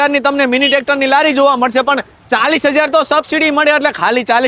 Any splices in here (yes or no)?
no